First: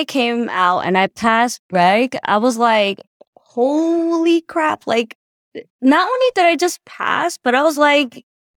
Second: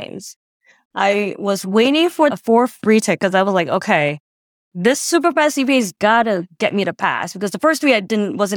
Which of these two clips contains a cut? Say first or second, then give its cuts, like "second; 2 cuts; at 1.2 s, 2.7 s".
second; 1 cut; at 2.3 s